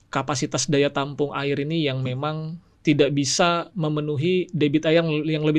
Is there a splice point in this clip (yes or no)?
no